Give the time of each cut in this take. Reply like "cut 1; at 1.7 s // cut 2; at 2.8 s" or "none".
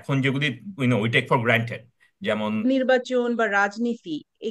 cut 1; at 2.6 s